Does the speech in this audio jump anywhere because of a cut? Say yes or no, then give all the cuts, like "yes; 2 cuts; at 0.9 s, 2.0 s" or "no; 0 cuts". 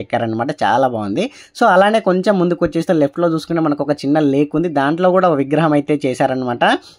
no; 0 cuts